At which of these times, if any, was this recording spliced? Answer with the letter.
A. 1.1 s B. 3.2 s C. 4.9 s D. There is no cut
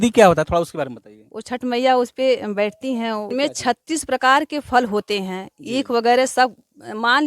B